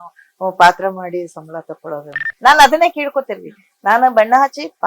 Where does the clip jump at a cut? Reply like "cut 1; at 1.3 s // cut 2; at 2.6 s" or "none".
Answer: cut 1; at 2.2 s

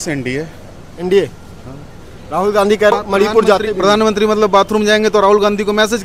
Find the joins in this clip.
cut 1; at 2.9 s

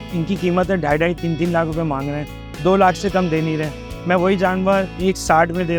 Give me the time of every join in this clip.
none

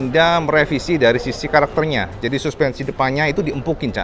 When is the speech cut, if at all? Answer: none

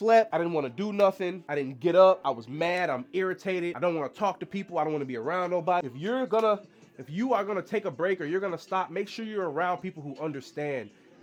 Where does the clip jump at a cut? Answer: none

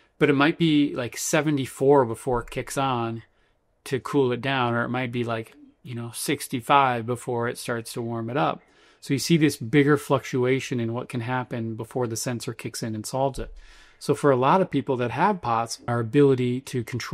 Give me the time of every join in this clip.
cut 1; at 15.9 s

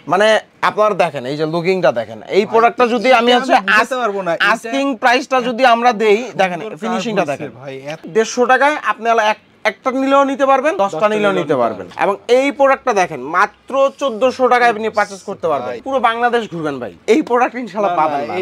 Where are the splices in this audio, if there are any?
cut 1; at 8.1 s // cut 2; at 15.8 s

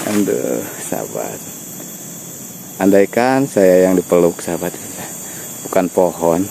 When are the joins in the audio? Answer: none

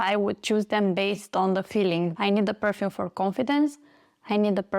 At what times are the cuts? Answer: cut 1; at 2.1 s

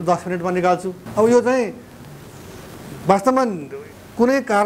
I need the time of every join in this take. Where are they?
cut 1; at 1.0 s

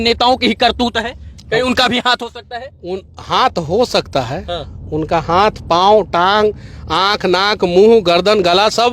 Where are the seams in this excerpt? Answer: none

